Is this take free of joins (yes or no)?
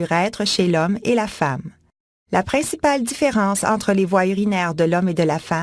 no